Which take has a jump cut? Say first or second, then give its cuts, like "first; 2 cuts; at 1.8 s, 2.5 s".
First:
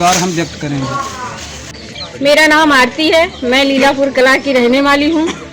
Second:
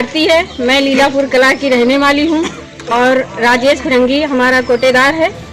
first; 1 cut; at 1.7 s